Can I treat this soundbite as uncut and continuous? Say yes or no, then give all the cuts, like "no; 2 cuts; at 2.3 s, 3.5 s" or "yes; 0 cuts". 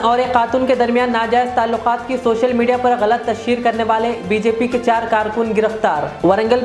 yes; 0 cuts